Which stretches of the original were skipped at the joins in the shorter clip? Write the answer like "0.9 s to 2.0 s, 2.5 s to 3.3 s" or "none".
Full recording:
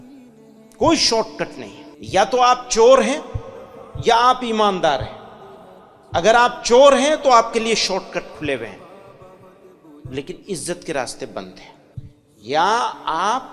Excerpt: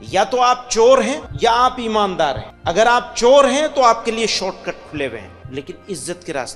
3.3 s to 3.9 s, 5.1 s to 6.0 s, 8.8 s to 10.0 s